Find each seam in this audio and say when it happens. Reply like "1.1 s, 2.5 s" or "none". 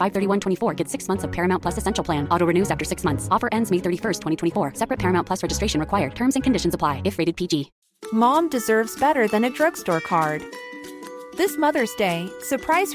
7.8 s

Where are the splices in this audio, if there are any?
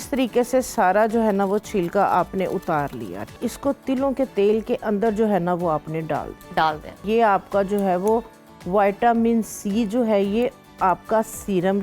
3.4 s, 7.0 s

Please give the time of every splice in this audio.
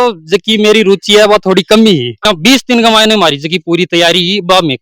2.3 s

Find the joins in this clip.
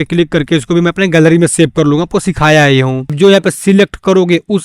3.1 s

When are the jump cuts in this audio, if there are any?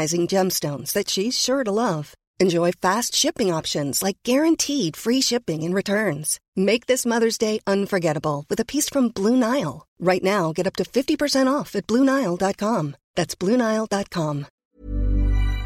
14.5 s

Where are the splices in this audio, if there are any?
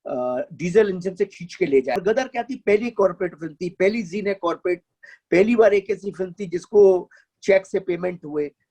2.0 s

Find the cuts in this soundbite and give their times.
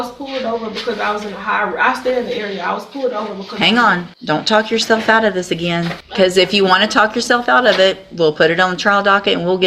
4.1 s, 6.0 s

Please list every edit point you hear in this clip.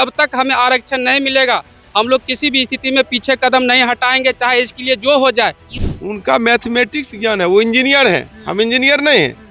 5.6 s

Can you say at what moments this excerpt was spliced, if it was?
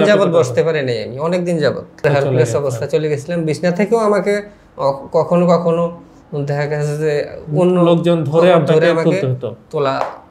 2.0 s

